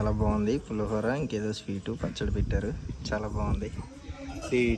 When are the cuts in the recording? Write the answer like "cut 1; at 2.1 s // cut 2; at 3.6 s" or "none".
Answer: none

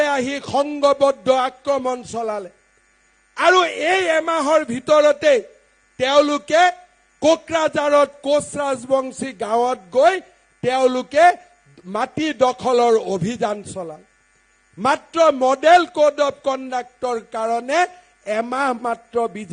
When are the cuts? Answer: none

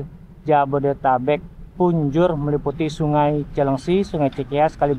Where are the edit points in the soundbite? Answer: none

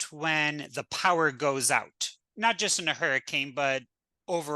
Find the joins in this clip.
cut 1; at 2.3 s

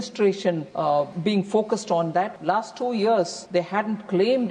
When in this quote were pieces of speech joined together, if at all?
cut 1; at 0.9 s // cut 2; at 2.4 s // cut 3; at 3.4 s

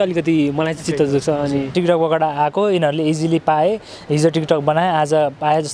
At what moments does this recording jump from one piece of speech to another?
cut 1; at 1.7 s

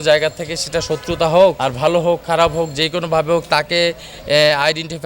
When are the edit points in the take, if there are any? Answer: cut 1; at 1.7 s

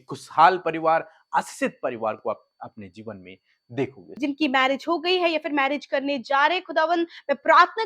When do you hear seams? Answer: cut 1; at 4.1 s

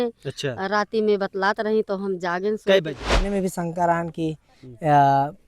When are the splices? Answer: cut 1; at 3.3 s

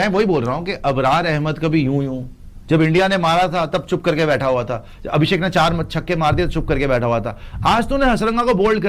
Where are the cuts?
none

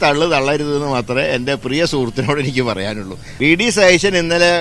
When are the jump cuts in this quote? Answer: cut 1; at 3.2 s

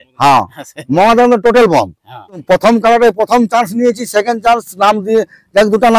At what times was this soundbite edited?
cut 1; at 2.4 s

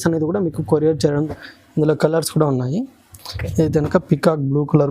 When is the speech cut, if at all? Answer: cut 1; at 1.3 s

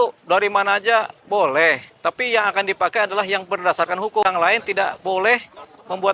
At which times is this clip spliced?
cut 1; at 4.2 s

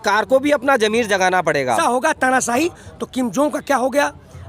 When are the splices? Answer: cut 1; at 1.8 s

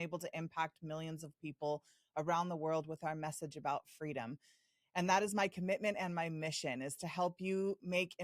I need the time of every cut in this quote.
none

